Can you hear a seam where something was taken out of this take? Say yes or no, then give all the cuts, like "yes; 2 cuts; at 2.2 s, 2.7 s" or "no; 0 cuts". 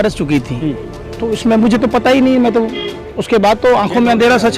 no; 0 cuts